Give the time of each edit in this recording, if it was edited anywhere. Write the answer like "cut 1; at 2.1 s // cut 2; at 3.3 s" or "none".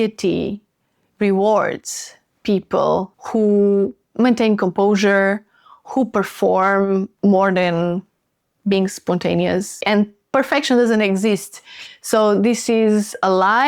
cut 1; at 3.2 s // cut 2; at 7.1 s // cut 3; at 9.8 s